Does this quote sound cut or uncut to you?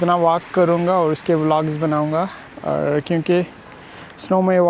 cut